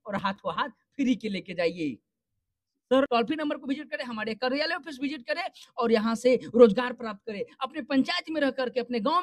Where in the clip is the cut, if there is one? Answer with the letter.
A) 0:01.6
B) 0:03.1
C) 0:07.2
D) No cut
B